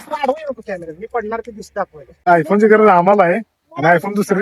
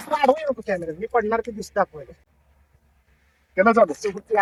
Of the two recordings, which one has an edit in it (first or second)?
first